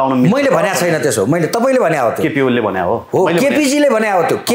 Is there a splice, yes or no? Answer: no